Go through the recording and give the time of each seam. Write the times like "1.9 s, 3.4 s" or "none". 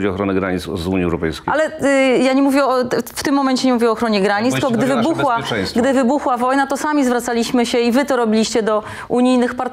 none